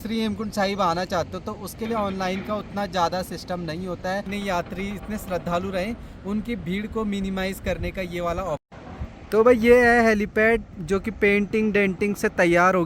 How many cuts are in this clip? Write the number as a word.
two